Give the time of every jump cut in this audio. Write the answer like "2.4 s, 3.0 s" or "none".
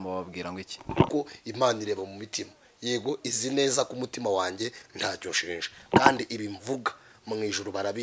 1.1 s